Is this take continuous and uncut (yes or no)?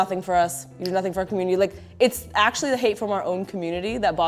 yes